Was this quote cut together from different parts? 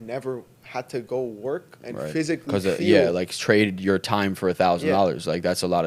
no; 0 cuts

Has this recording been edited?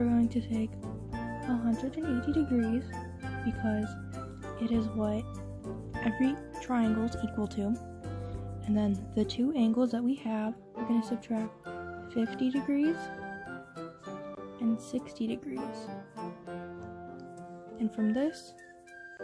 yes; 3 cuts; at 16.1 s, 17.4 s, 18.3 s

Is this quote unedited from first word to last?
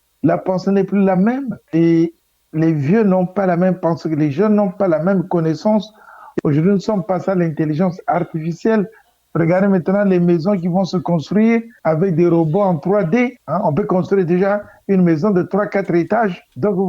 no; 1 cut; at 1.5 s

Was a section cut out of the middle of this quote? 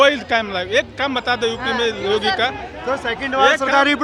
no; 0 cuts

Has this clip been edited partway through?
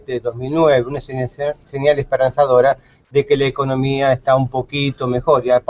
no; 0 cuts

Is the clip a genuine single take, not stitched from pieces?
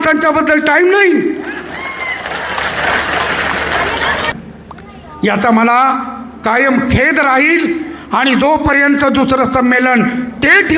no; 1 cut; at 4.3 s

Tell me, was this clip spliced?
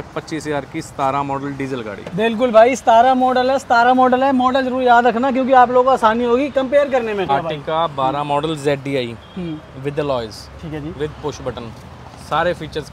yes; 1 cut; at 7.3 s

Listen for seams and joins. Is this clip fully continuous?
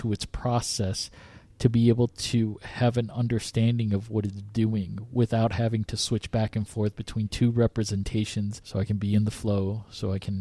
no; 1 cut; at 8.6 s

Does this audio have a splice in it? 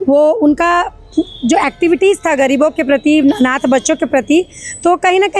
no; 0 cuts

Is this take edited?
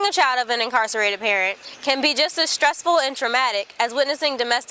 no; 0 cuts

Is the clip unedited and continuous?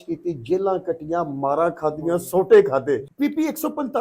no; 1 cut; at 3.1 s

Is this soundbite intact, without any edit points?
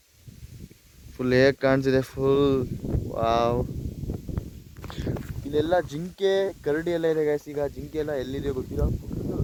yes; 0 cuts

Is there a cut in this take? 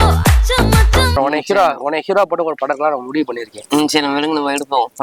yes; 1 cut; at 1.1 s

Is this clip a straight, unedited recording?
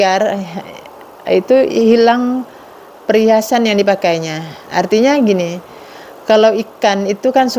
yes; 0 cuts

